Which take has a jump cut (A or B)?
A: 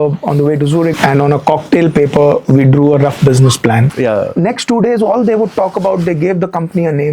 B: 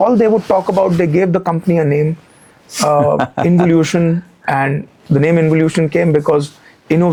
A